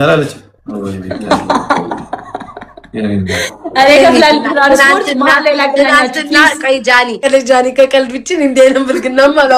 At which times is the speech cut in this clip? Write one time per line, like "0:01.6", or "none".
0:07.3